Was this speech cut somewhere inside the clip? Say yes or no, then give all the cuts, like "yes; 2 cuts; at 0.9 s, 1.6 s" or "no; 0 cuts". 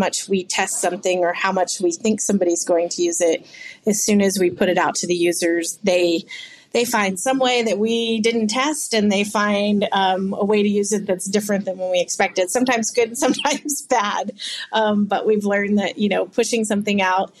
no; 0 cuts